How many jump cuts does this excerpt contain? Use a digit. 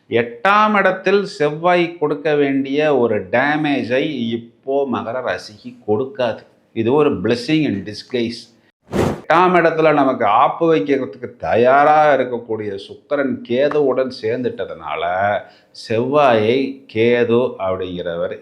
1